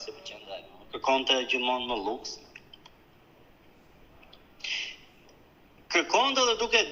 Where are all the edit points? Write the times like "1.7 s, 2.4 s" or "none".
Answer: none